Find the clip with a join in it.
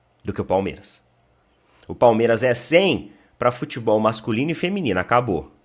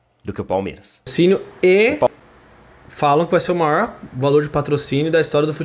second; 1 cut; at 1.1 s

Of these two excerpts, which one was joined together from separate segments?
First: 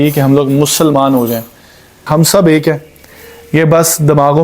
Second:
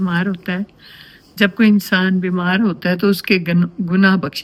first; 1 cut; at 2.0 s

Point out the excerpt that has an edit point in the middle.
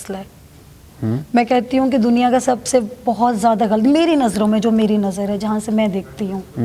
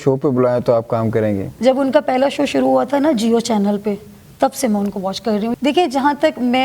second; 2 cuts; at 1.6 s, 5.5 s

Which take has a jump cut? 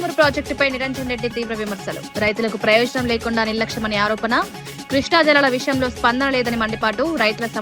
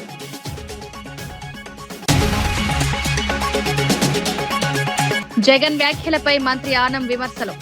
second; 3 cuts; at 2.0 s, 3.4 s, 4.8 s

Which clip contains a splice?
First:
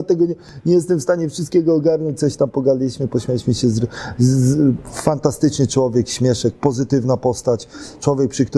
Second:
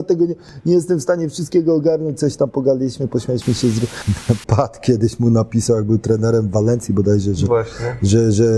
second; 1 cut; at 4.0 s

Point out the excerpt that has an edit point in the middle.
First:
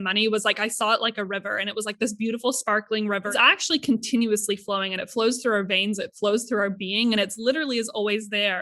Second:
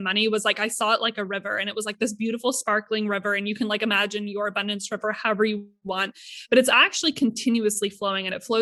first; 2 cuts; at 3.3 s, 7.3 s

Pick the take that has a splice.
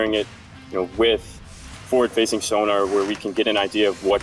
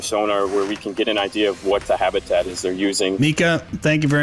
second; 1 cut; at 3.2 s

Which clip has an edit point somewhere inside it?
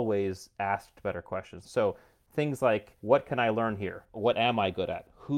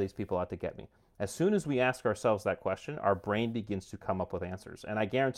first; 3 cuts; at 1.6 s, 2.9 s, 4.1 s

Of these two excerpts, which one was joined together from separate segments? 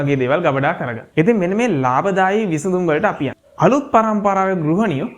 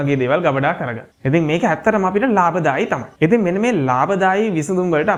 first; 2 cuts; at 1.0 s, 3.4 s

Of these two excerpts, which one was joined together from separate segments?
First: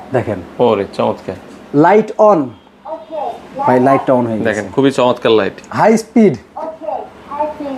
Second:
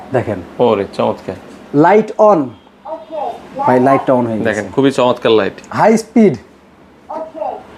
first; 1 cut; at 6.5 s

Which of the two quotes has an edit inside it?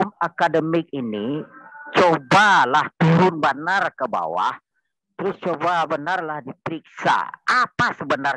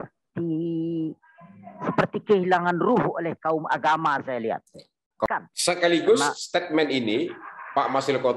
second; 1 cut; at 5.3 s

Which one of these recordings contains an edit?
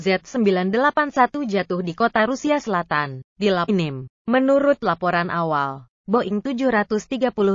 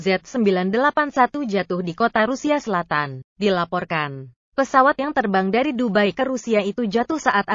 second; 1 cut; at 3.7 s

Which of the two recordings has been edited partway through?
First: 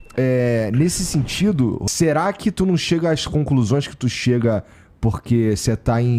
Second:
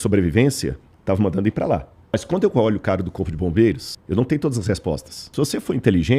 second; 3 cuts; at 2.1 s, 3.9 s, 5.3 s

